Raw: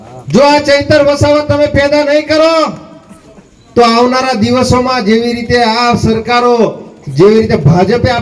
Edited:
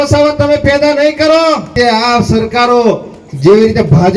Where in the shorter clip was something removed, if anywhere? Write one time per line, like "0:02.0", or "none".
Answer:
0:01.7